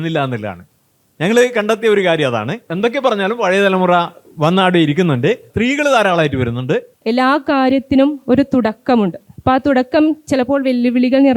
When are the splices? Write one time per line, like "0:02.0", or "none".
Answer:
0:02.6
0:05.5
0:06.9